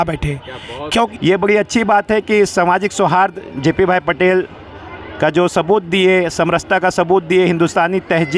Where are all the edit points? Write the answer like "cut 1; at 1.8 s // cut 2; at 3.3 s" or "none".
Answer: cut 1; at 1.1 s